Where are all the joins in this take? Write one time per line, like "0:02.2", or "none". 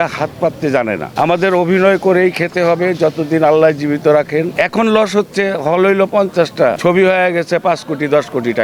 0:01.1
0:04.5
0:06.8